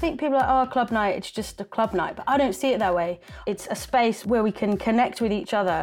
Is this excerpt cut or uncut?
cut